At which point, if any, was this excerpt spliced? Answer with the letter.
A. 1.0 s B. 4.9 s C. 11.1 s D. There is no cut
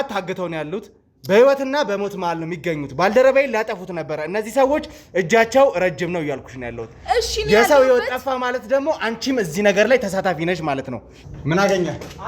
C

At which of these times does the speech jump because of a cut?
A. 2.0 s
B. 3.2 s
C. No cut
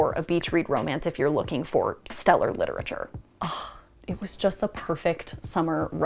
B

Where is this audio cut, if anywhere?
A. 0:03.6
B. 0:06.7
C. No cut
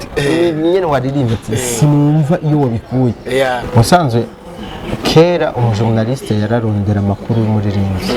A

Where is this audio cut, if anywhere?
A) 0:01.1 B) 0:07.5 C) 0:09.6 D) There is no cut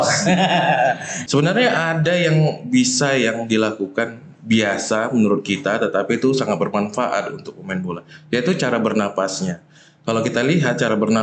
A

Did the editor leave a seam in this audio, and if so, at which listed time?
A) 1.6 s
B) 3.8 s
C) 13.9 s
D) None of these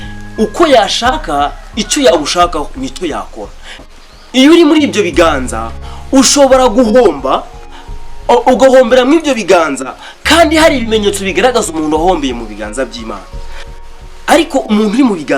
B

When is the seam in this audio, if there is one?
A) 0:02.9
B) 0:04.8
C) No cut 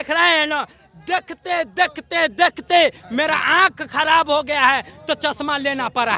C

